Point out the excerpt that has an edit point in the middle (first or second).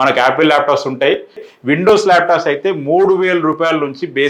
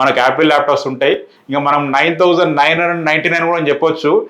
first